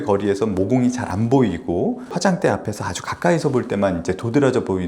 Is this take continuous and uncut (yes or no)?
no